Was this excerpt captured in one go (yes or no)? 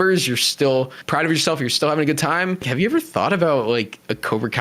no